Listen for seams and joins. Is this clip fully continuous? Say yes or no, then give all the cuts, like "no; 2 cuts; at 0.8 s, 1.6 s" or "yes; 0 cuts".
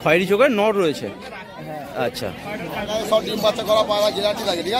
no; 1 cut; at 2.7 s